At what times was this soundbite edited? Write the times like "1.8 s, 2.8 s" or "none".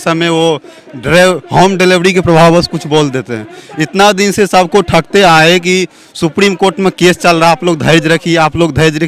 none